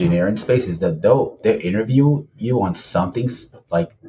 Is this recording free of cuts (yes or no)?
yes